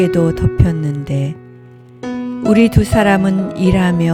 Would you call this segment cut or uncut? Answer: uncut